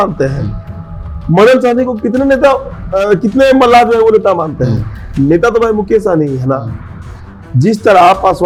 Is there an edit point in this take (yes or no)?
no